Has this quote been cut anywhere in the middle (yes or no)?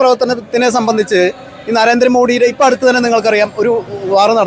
no